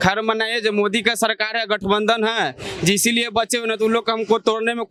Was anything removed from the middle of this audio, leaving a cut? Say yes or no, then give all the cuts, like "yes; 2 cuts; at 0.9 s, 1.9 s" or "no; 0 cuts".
no; 0 cuts